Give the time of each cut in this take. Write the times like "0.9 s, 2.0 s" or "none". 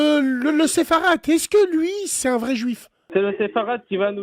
3.0 s